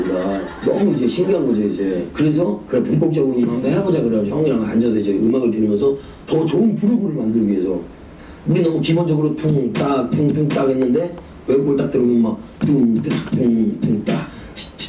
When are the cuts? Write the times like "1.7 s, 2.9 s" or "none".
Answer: 3.0 s